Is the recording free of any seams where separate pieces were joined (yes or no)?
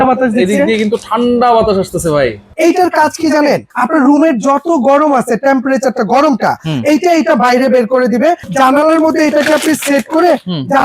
no